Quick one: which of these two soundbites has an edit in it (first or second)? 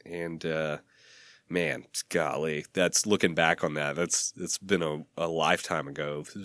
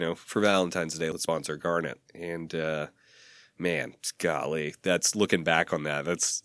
second